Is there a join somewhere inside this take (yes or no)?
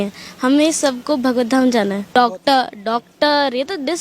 yes